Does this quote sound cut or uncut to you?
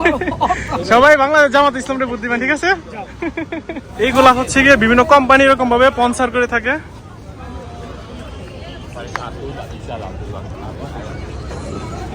cut